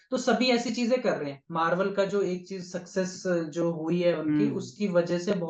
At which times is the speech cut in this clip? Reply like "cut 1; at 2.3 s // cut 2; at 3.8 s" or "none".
cut 1; at 1.4 s